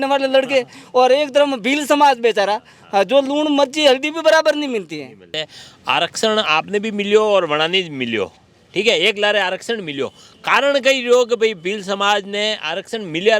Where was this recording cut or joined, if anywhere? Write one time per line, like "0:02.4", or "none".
0:05.4